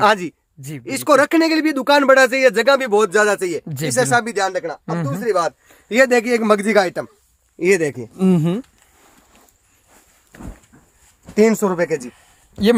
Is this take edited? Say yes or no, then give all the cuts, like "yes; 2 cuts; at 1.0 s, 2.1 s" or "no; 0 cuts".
no; 0 cuts